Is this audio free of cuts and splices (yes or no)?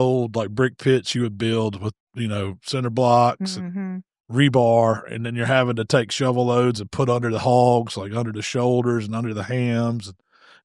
yes